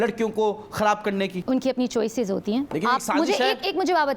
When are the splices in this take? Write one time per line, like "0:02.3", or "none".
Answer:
none